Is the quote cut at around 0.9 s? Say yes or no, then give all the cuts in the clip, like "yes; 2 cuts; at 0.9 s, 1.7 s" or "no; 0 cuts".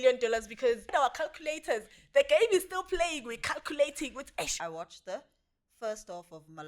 yes; 2 cuts; at 0.9 s, 4.6 s